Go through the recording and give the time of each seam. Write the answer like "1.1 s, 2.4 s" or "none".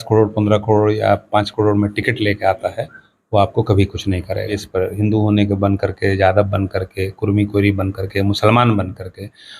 4.6 s